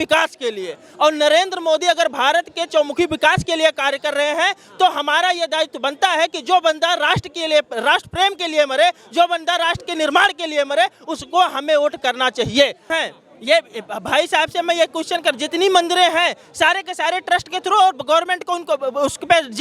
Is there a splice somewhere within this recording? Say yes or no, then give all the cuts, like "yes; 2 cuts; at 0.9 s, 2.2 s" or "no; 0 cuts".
yes; 1 cut; at 12.9 s